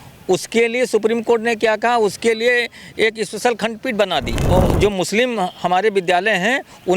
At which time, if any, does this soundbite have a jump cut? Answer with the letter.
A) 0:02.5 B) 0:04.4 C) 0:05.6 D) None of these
B